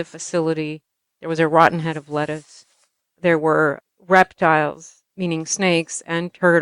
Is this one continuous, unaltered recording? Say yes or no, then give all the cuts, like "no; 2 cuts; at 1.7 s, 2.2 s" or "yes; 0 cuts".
no; 2 cuts; at 3.8 s, 5.0 s